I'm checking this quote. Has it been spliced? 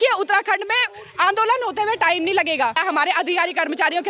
yes; 1 cut; at 2.8 s

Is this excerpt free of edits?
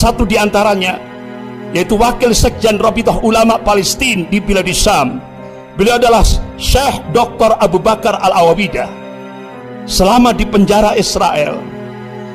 yes; 0 cuts

